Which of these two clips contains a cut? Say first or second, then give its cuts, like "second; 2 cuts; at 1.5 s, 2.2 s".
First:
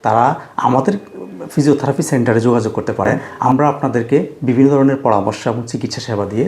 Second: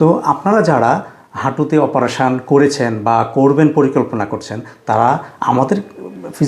first; 1 cut; at 3.2 s